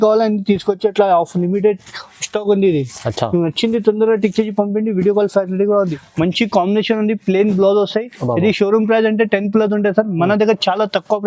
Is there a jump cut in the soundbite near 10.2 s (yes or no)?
no